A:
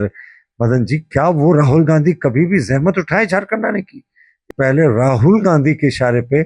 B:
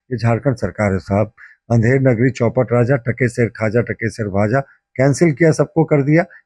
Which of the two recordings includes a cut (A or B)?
A